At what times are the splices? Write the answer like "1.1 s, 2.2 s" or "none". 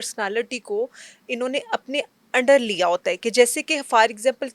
none